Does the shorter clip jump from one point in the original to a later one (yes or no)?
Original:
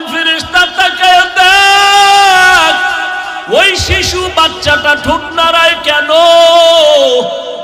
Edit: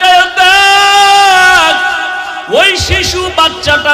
no